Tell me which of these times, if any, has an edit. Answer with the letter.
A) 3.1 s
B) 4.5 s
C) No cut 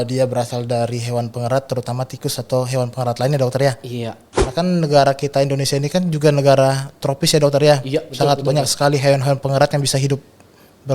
B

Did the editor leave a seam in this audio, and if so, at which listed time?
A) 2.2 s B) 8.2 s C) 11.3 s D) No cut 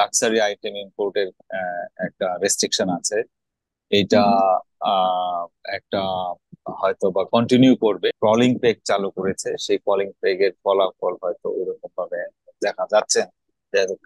B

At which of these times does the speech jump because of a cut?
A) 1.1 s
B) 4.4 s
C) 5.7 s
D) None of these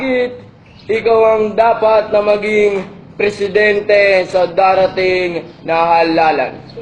B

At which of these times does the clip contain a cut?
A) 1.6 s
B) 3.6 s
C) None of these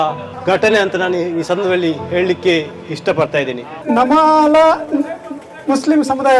B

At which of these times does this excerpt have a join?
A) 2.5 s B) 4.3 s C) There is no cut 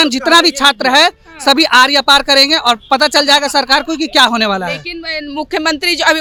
C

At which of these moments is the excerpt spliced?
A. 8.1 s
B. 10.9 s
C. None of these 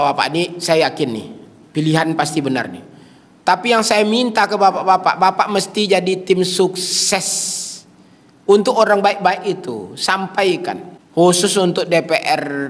B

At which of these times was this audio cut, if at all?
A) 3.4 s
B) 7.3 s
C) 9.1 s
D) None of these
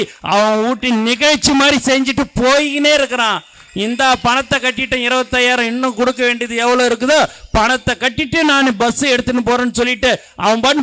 D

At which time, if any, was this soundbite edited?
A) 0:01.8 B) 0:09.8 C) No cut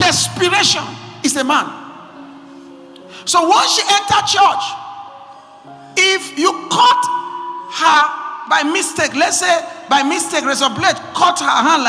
C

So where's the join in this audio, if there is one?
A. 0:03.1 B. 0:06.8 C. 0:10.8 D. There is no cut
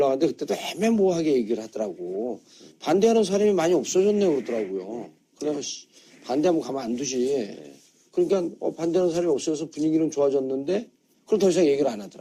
D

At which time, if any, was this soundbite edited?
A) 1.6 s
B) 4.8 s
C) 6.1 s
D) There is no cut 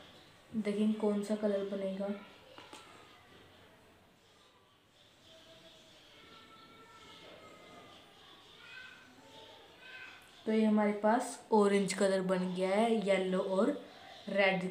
B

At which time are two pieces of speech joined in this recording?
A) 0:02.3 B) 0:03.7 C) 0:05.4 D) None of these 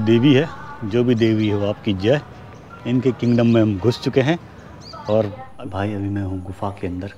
C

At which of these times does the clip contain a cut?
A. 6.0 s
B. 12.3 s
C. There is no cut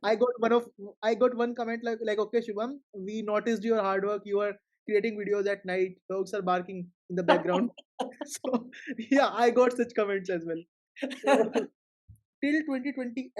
B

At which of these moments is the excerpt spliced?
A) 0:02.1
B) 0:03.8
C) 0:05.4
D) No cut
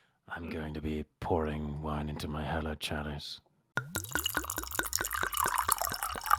D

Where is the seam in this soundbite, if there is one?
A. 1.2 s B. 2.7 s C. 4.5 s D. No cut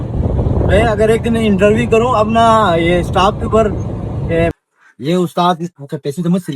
C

